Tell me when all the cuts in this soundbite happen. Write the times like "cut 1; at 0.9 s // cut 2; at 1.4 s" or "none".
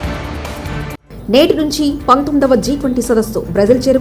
cut 1; at 1.0 s